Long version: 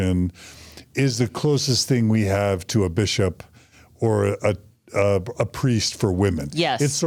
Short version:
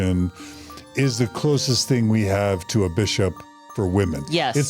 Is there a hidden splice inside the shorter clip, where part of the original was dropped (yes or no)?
yes